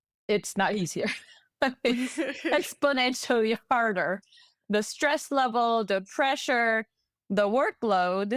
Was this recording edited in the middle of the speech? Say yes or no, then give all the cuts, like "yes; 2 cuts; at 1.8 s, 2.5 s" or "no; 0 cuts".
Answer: no; 0 cuts